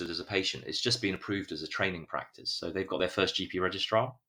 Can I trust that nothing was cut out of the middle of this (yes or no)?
yes